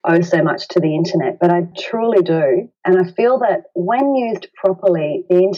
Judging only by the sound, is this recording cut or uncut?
cut